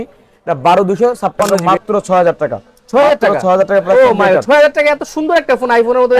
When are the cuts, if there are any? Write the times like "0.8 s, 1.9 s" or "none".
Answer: 1.5 s